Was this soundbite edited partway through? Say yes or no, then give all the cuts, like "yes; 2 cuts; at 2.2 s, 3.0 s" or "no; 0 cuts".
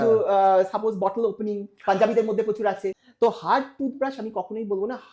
yes; 1 cut; at 3.0 s